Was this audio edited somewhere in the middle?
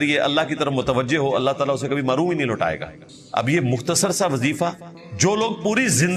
no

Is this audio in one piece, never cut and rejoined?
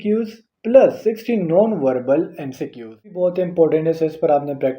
no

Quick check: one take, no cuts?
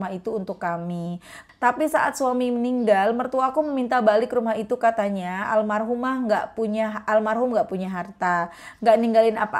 no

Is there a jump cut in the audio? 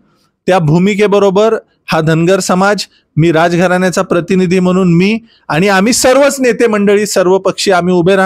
no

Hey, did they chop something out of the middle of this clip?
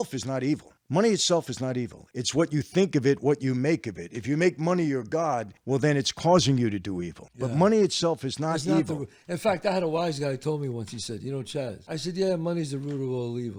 no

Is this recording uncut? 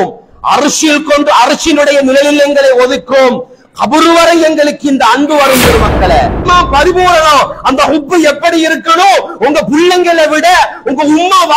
no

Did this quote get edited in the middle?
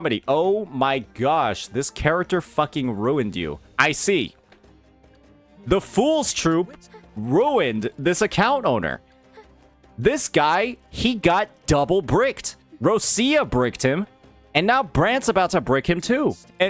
no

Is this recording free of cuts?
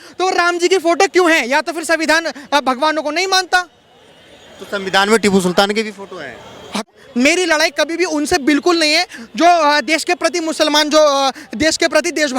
no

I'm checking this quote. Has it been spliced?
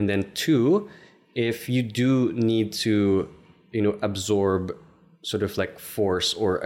no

